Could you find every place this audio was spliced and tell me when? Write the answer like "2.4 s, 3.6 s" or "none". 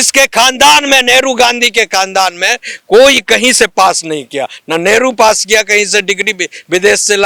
none